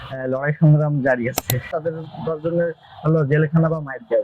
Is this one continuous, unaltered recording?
no; 1 cut; at 1.7 s

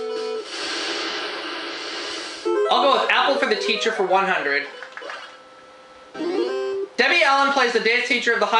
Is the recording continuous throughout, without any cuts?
no; 1 cut; at 2.5 s

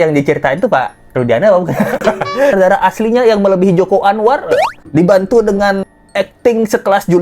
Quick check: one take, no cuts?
no; 1 cut; at 2.5 s

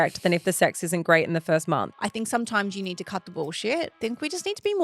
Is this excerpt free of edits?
no; 2 cuts; at 1.9 s, 3.9 s

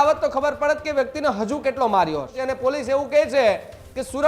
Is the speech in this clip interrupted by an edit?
yes; 1 cut; at 2.4 s

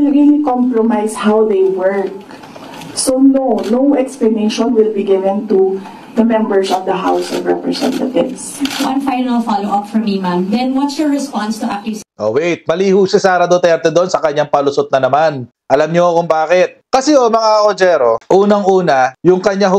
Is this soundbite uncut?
yes; 0 cuts

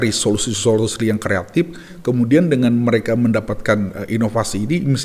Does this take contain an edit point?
no; 0 cuts

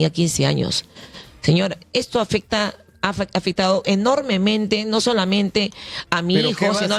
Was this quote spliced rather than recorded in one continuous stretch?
no; 0 cuts

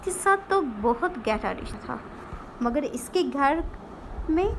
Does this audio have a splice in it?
yes; 1 cut; at 1.7 s

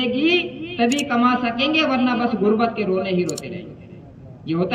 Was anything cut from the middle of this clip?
no; 0 cuts

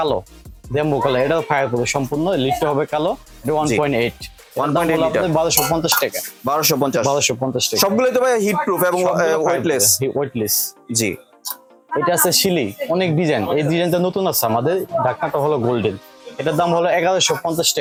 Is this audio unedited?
yes; 0 cuts

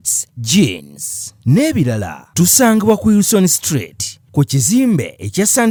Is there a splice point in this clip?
no; 0 cuts

